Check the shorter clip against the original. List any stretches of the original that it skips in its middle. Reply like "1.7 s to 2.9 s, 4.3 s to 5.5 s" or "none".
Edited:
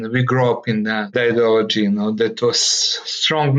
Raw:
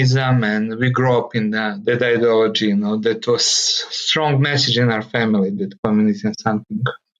1.8 s to 2.0 s